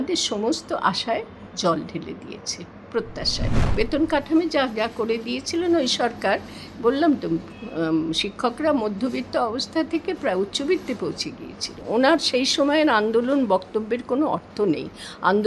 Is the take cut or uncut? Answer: cut